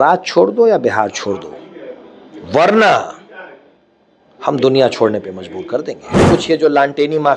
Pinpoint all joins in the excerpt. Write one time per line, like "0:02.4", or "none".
0:06.3